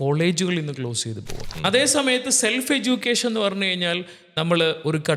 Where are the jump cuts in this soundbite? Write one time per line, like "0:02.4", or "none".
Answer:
0:01.4